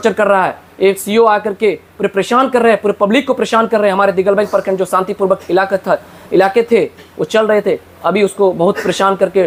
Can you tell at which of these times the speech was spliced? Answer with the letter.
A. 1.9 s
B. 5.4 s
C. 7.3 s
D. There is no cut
D